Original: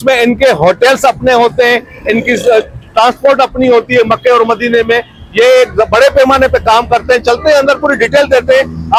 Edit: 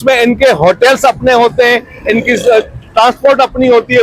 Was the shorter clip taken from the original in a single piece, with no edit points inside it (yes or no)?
yes